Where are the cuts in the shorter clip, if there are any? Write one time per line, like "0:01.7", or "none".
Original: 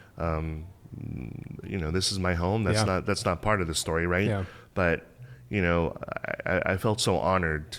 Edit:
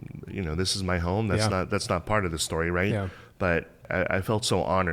0:03.8